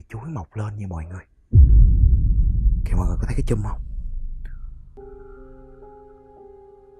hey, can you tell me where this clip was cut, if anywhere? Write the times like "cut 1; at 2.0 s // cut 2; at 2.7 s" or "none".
cut 1; at 4.9 s